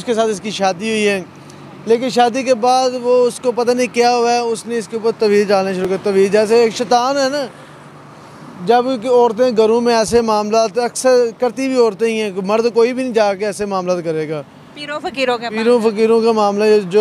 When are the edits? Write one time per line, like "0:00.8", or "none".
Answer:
none